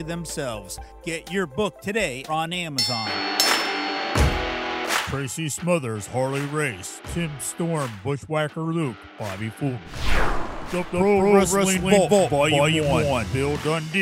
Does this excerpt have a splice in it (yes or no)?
yes